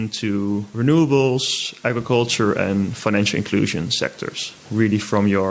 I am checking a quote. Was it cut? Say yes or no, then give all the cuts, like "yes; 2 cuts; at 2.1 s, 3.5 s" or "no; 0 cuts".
no; 0 cuts